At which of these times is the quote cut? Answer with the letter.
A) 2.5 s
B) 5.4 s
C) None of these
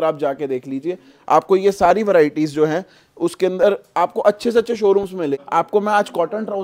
B